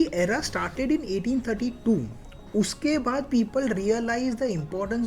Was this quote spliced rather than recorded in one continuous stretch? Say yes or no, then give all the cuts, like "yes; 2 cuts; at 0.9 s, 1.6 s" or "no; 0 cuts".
no; 0 cuts